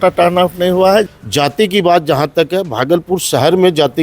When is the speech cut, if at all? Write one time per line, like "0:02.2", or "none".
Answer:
0:01.1